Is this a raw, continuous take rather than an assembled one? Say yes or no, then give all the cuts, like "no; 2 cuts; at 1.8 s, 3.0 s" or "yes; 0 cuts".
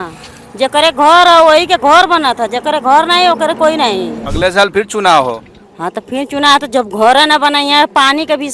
no; 1 cut; at 4.2 s